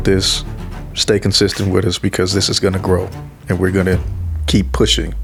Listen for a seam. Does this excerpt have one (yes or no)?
no